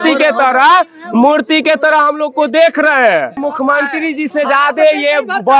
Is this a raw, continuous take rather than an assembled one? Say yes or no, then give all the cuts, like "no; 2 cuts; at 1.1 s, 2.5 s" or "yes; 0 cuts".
no; 1 cut; at 3.4 s